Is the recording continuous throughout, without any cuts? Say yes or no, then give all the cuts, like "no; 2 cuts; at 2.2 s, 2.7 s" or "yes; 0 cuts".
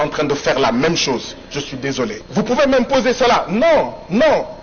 no; 1 cut; at 2.2 s